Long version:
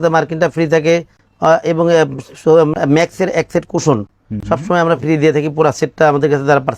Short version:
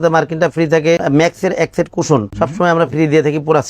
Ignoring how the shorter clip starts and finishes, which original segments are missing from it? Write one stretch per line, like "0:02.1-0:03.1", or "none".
0:01.0-0:02.8
0:04.1-0:04.4